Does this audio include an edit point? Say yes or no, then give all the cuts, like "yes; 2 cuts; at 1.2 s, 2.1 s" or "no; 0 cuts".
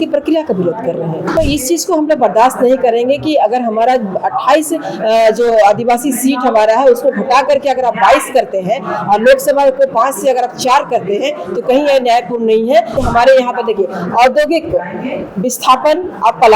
yes; 2 cuts; at 1.4 s, 12.9 s